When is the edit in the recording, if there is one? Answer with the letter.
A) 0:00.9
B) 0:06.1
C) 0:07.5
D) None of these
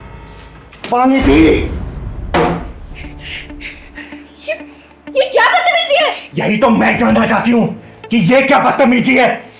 A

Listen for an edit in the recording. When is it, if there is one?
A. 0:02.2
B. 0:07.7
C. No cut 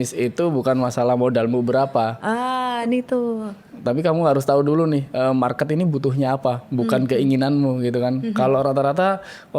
C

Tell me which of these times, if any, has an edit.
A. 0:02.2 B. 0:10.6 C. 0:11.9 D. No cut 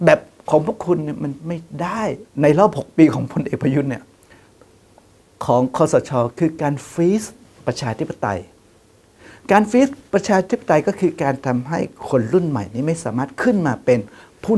A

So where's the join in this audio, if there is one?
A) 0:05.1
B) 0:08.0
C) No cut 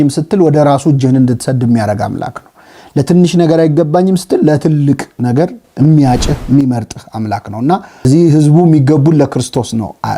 B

